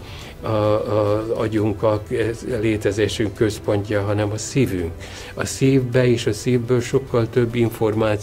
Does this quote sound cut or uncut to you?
uncut